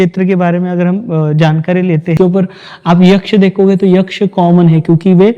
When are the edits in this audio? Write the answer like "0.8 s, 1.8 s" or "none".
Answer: 2.1 s